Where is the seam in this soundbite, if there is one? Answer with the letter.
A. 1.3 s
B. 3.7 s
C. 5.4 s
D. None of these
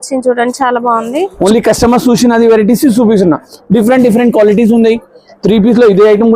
A